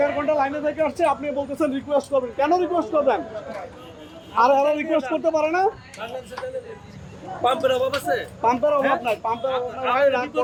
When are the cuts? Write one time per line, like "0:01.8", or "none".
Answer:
none